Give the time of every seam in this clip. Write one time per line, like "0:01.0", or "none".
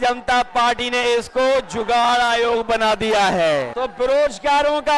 0:03.7